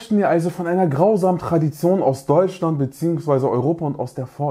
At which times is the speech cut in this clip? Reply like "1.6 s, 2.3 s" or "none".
none